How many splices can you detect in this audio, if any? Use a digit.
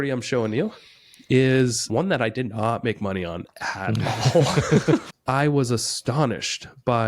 2